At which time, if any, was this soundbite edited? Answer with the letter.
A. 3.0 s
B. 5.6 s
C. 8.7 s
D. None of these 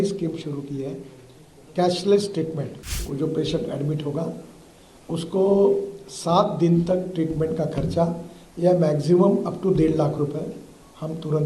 A